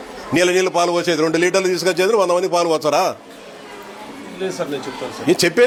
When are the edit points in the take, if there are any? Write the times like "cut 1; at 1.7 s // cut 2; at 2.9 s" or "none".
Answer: none

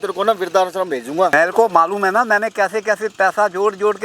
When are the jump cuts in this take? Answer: cut 1; at 1.3 s

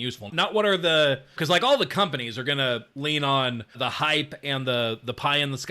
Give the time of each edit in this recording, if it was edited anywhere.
cut 1; at 1.3 s // cut 2; at 3.7 s

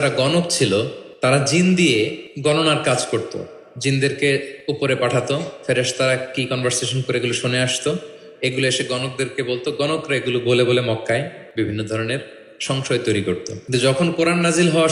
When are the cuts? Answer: cut 1; at 1.0 s // cut 2; at 2.2 s // cut 3; at 4.5 s // cut 4; at 11.4 s // cut 5; at 13.5 s

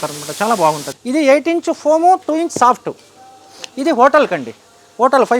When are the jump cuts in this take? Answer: cut 1; at 0.9 s

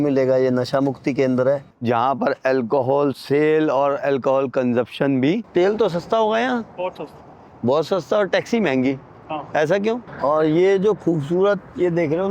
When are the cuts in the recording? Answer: cut 1; at 1.6 s // cut 2; at 5.4 s // cut 3; at 10.1 s

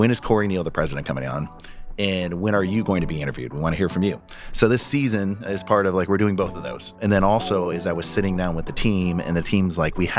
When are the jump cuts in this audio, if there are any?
cut 1; at 7.0 s

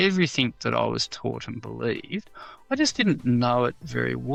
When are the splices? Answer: none

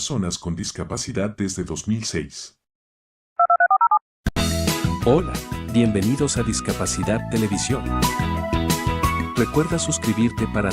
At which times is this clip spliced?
cut 1; at 4.2 s

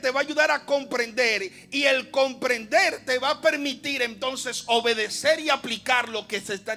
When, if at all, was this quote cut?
none

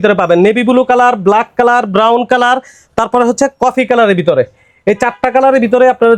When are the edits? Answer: none

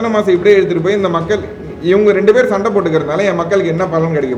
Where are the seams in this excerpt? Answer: none

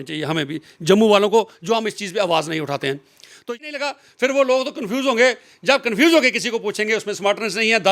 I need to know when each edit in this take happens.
cut 1; at 3.4 s

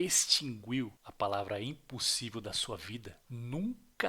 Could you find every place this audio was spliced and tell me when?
cut 1; at 1.0 s // cut 2; at 3.2 s

